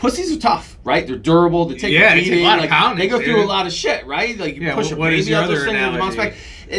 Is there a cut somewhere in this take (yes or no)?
no